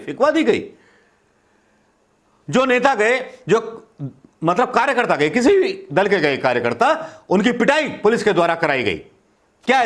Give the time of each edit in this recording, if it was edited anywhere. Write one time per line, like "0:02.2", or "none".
none